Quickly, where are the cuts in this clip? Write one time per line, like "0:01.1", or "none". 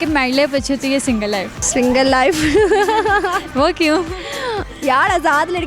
0:01.6

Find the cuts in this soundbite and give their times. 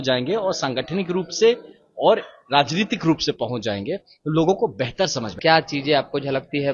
0:05.3

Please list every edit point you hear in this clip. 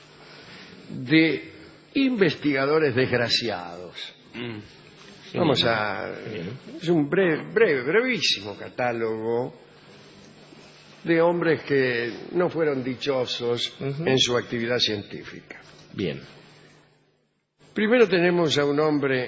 none

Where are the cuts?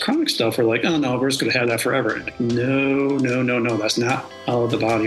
none

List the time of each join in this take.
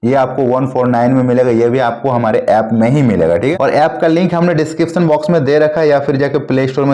0:03.6

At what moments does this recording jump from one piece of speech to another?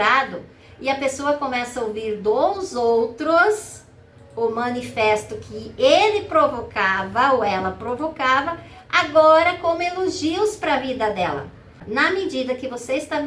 0:11.8

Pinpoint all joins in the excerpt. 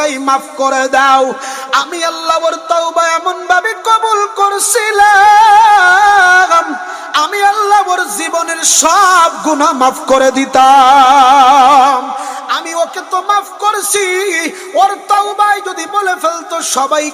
none

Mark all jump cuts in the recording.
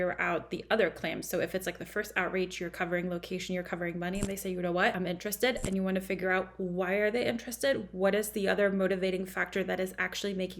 0:05.0

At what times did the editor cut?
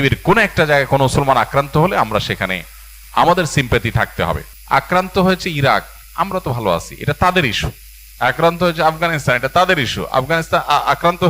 0:04.5

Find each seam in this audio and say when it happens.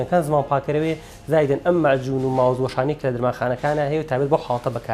none

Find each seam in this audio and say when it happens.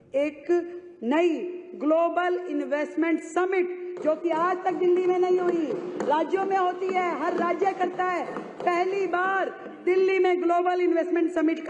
none

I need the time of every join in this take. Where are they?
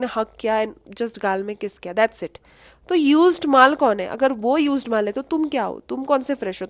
none

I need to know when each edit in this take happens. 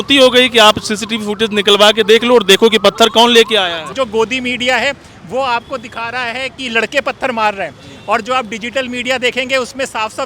0:03.9

